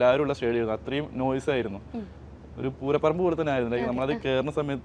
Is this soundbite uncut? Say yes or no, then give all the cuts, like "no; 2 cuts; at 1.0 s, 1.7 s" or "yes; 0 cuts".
yes; 0 cuts